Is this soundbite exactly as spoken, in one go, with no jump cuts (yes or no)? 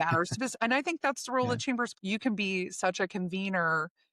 no